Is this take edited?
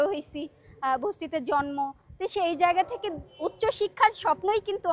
no; 0 cuts

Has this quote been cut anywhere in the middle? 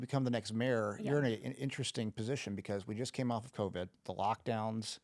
yes; 1 cut; at 4.0 s

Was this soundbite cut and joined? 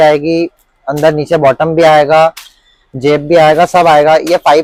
no; 0 cuts

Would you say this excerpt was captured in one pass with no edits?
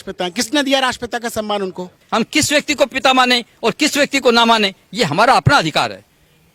yes; 0 cuts

